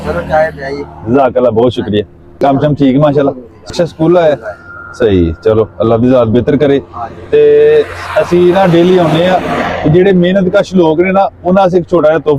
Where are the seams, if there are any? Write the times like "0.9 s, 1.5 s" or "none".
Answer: 2.2 s, 3.7 s